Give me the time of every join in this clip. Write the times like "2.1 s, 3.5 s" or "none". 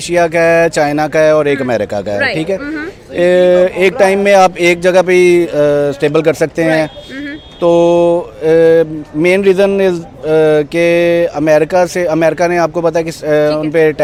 none

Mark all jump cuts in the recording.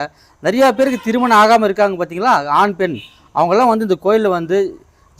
none

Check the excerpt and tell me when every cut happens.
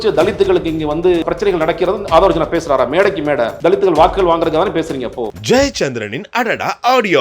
1.2 s, 3.5 s, 5.3 s

